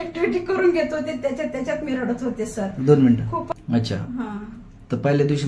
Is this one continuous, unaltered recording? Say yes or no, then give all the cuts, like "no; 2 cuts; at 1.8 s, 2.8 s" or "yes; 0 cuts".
no; 1 cut; at 3.5 s